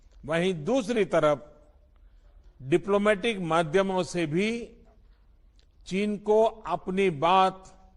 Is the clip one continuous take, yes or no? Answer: yes